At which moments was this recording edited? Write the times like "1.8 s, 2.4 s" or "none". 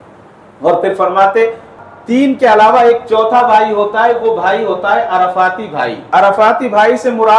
1.7 s